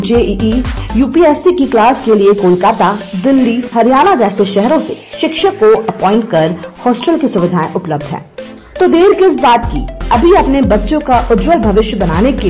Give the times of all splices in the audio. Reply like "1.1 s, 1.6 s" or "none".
none